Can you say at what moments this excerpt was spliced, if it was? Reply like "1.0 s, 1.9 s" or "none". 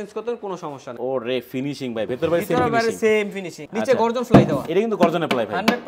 1.0 s, 3.6 s